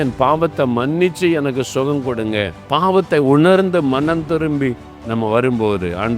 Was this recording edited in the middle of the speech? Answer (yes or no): yes